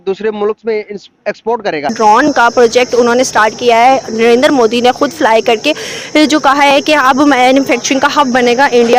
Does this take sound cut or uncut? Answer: cut